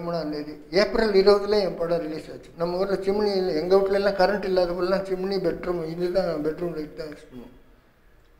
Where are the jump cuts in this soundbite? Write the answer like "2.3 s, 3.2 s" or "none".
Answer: 2.4 s